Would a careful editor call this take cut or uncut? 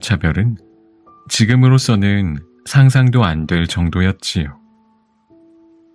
cut